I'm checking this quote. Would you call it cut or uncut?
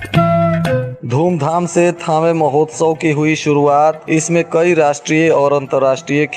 cut